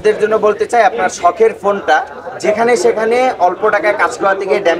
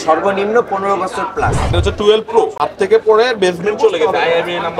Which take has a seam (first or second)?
second